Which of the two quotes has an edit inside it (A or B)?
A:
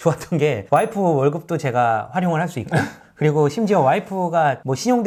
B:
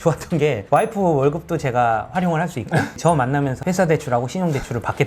B